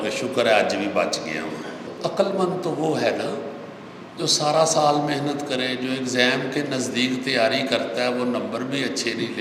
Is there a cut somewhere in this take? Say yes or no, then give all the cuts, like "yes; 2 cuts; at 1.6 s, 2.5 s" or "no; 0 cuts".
yes; 1 cut; at 1.8 s